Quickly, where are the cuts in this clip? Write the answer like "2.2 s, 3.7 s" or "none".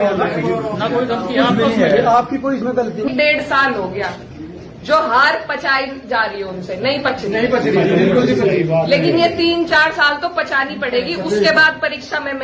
3.1 s